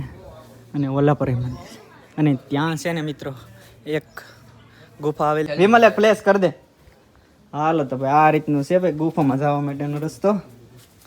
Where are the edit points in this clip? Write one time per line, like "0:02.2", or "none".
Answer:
0:05.5